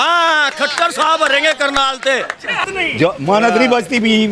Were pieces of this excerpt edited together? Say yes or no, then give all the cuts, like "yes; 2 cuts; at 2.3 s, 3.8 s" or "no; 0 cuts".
yes; 1 cut; at 2.6 s